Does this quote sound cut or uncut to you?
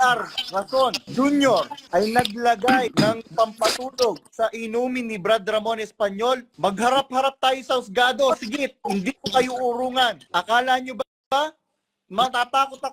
cut